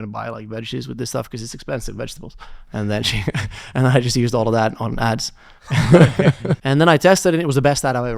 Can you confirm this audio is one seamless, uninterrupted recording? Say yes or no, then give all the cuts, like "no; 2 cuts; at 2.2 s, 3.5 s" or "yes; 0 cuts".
no; 1 cut; at 6.6 s